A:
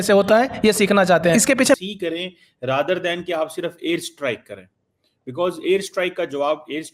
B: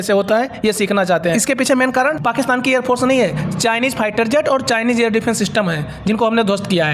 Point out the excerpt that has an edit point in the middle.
A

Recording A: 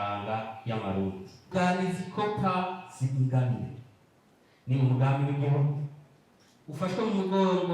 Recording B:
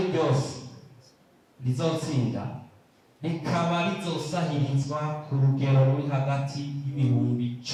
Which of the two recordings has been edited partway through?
A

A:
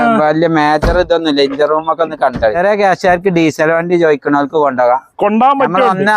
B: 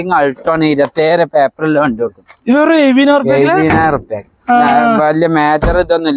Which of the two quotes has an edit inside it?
A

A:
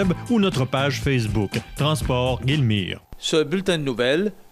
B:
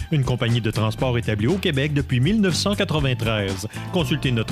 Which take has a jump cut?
A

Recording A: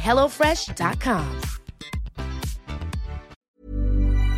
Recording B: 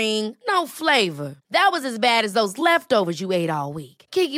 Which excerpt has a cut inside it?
A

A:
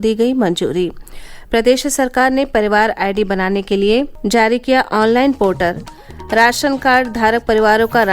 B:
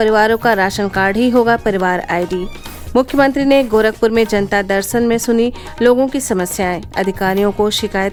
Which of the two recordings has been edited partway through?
A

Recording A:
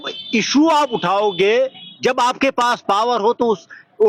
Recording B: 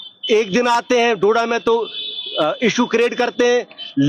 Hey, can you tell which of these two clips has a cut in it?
A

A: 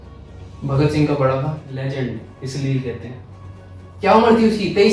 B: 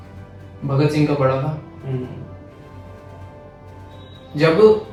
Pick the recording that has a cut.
A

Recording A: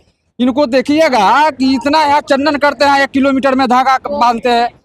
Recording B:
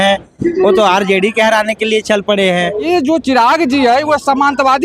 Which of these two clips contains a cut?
B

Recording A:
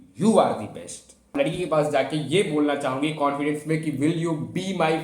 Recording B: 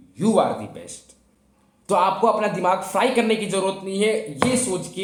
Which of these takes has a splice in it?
A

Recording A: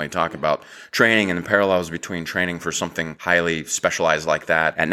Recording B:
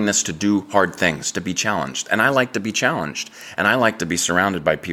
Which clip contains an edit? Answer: A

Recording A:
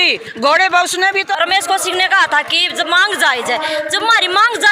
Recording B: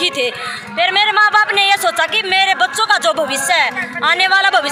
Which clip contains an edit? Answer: A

